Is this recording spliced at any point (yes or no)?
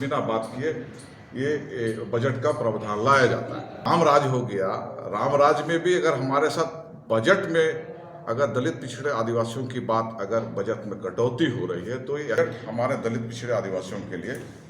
yes